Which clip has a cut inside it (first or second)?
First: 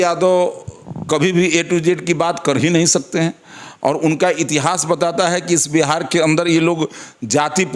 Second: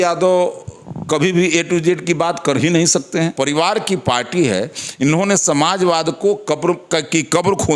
second